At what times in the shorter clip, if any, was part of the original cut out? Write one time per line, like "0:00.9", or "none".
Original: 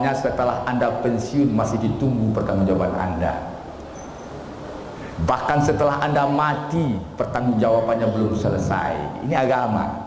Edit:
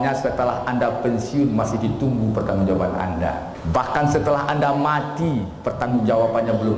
0:03.5